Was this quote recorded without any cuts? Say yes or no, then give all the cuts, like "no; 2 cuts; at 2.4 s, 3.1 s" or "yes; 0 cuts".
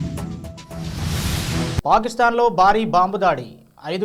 yes; 0 cuts